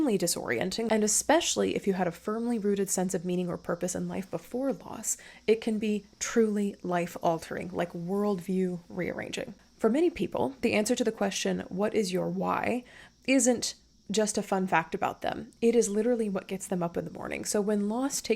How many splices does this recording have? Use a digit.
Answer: 2